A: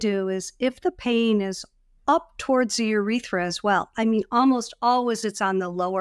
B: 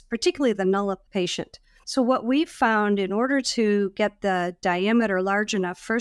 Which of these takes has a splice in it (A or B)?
B